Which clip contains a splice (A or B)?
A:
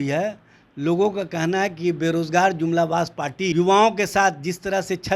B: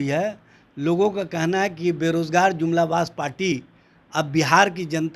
A